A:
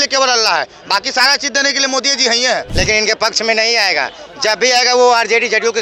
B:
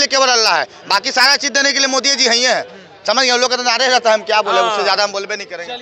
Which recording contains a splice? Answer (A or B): A